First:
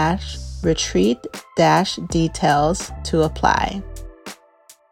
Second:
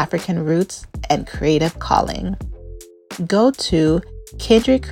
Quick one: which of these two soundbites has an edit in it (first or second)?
first